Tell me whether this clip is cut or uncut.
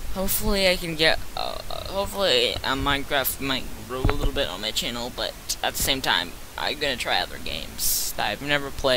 cut